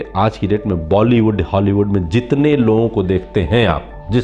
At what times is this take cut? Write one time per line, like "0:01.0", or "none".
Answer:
none